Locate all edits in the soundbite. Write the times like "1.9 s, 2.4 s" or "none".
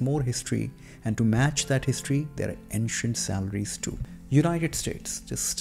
4.1 s